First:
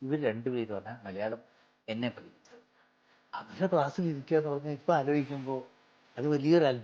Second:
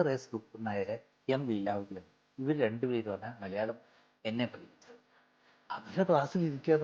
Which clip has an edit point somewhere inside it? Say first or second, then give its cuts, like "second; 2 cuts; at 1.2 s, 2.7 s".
second; 1 cut; at 1.1 s